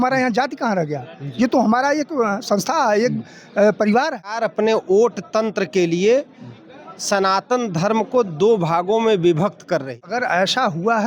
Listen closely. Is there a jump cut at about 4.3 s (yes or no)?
yes